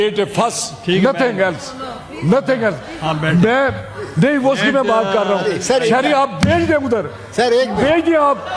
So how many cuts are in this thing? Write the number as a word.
zero